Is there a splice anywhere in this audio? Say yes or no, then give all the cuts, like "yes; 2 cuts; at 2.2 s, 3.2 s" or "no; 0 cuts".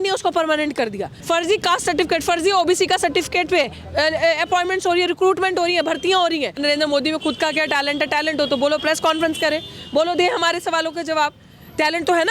yes; 2 cuts; at 1.1 s, 6.6 s